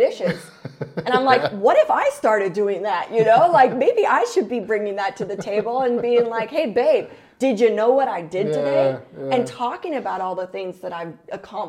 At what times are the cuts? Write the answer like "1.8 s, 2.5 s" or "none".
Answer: none